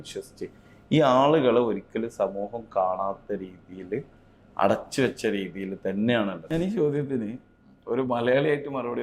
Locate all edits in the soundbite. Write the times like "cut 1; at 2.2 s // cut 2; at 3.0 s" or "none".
cut 1; at 6.4 s